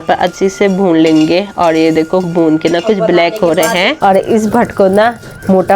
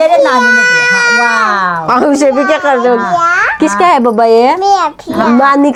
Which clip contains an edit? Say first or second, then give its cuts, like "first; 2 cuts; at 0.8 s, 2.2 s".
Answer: first; 1 cut; at 3.9 s